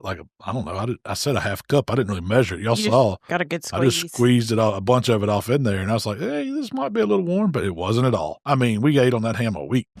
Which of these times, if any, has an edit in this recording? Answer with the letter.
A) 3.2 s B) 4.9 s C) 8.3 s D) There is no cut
C